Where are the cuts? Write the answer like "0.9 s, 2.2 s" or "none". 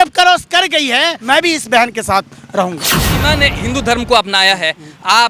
1.2 s, 3.2 s